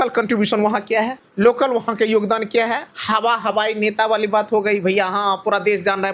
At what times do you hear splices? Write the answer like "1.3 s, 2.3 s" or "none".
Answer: 1.2 s, 2.9 s